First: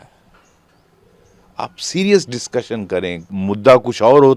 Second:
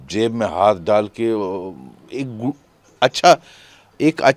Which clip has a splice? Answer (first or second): first